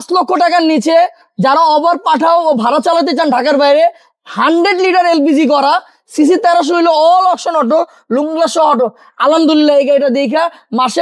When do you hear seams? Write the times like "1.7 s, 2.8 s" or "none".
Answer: none